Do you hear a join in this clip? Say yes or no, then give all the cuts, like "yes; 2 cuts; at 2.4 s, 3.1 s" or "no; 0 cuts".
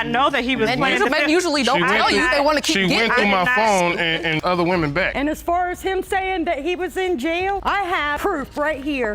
yes; 1 cut; at 5.1 s